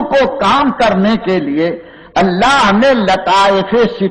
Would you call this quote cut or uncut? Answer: uncut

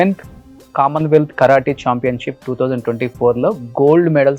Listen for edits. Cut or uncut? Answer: uncut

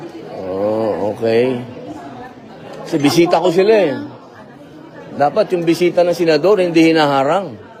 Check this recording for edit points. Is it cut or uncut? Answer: uncut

